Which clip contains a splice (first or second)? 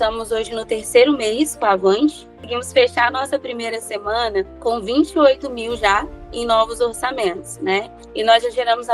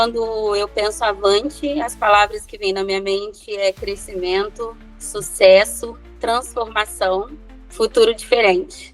first